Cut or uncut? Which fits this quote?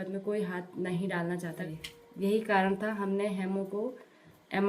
cut